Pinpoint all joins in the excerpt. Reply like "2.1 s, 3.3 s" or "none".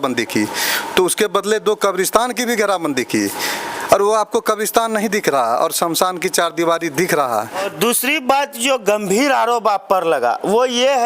7.7 s